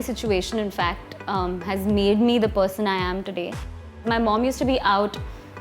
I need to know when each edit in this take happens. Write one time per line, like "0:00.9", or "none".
0:04.0